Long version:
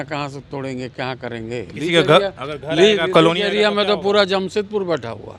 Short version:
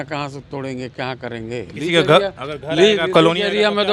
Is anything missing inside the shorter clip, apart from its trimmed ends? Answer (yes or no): no